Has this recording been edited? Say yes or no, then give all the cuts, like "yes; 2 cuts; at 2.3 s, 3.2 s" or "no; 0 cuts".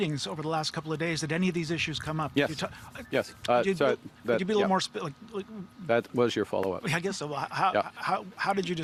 no; 0 cuts